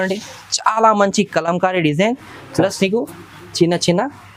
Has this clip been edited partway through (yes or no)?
no